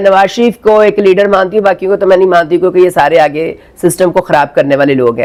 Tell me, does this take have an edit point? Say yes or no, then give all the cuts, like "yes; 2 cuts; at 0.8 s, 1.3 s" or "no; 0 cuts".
no; 0 cuts